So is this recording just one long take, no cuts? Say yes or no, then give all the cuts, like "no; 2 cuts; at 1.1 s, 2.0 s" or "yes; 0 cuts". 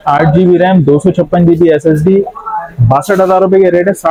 yes; 0 cuts